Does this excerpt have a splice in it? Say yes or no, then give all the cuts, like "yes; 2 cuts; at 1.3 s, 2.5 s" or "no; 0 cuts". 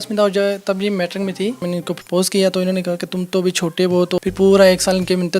yes; 2 cuts; at 1.6 s, 4.2 s